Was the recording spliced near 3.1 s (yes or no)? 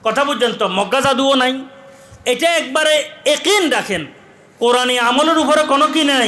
no